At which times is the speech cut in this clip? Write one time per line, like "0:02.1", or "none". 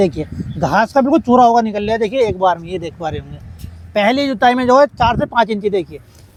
none